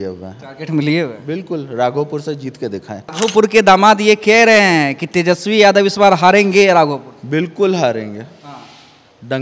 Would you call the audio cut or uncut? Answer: cut